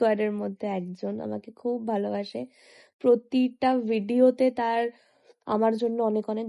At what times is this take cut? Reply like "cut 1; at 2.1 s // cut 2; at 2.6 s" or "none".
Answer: none